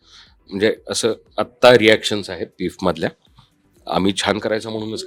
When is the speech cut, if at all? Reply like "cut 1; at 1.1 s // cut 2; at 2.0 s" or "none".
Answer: none

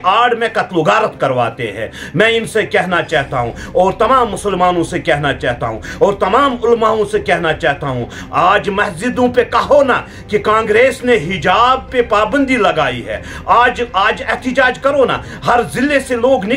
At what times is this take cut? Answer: none

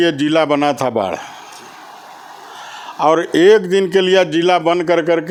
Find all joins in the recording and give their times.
none

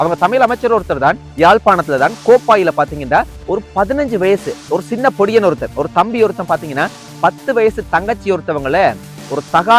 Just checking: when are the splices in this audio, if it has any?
cut 1; at 1.2 s

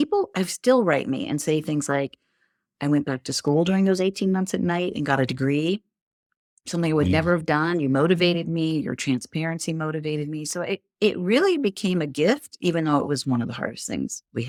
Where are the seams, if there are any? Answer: none

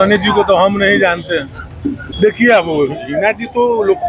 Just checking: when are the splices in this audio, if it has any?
cut 1; at 2.0 s

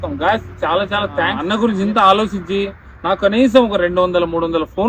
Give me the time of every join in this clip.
cut 1; at 1.4 s

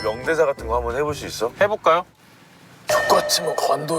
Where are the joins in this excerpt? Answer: cut 1; at 2.1 s

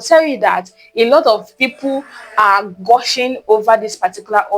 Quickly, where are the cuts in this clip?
none

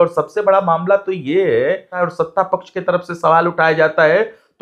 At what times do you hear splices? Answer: cut 1; at 1.9 s

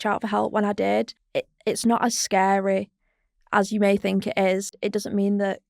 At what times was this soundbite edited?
cut 1; at 1.2 s // cut 2; at 4.8 s

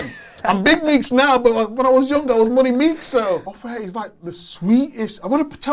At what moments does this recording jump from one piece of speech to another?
cut 1; at 3.5 s

